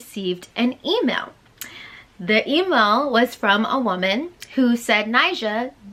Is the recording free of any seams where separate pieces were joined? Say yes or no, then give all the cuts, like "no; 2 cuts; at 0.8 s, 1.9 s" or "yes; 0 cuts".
yes; 0 cuts